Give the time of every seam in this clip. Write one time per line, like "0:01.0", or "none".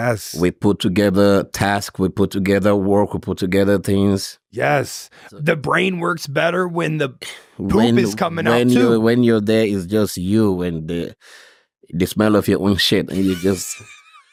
none